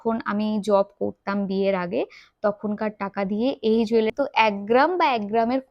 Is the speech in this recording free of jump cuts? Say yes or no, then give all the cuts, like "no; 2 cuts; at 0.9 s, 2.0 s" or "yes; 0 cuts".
no; 1 cut; at 4.1 s